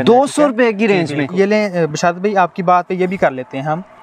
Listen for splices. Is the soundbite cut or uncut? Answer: cut